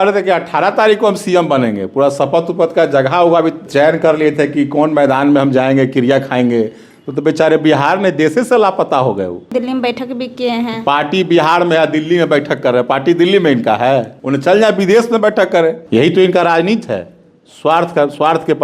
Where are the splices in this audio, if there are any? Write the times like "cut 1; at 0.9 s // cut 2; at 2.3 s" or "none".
cut 1; at 3.6 s // cut 2; at 9.5 s // cut 3; at 14.2 s // cut 4; at 15.8 s